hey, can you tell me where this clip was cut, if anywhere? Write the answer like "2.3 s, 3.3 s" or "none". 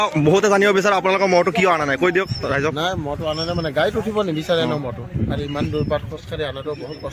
none